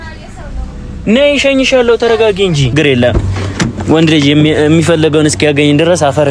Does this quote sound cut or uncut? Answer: cut